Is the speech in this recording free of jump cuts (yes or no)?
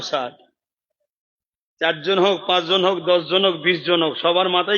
yes